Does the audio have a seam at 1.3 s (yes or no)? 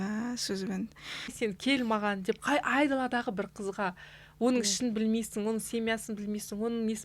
yes